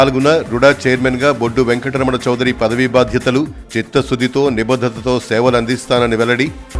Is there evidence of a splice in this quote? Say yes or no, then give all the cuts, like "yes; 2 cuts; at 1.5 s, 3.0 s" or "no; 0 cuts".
no; 0 cuts